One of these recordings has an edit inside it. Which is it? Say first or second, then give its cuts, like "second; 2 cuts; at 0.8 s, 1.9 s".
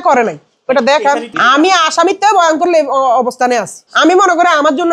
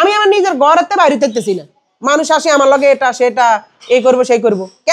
first; 1 cut; at 1.3 s